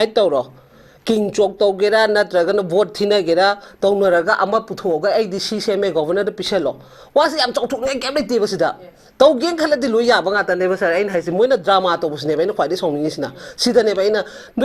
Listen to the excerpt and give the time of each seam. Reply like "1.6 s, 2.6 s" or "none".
none